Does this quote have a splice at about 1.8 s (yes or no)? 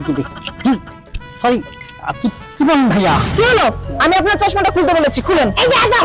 no